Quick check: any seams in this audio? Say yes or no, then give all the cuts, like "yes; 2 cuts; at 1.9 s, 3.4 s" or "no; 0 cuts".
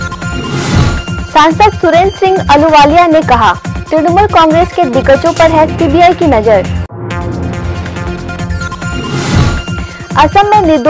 no; 0 cuts